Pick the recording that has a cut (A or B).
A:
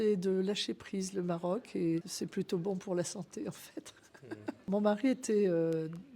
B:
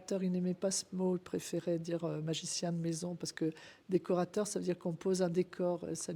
A